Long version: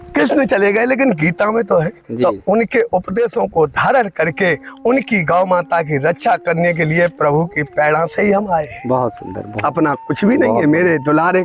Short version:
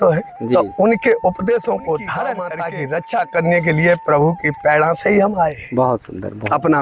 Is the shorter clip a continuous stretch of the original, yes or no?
no